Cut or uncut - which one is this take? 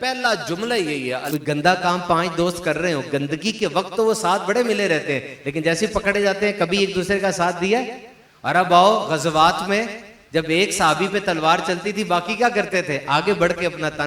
cut